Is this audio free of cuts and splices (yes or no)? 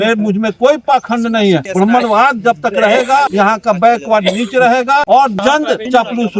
no